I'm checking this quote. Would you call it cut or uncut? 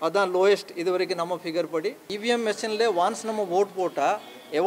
cut